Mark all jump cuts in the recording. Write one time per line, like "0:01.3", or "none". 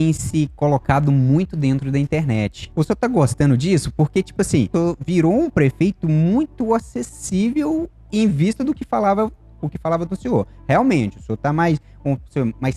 0:02.6
0:04.7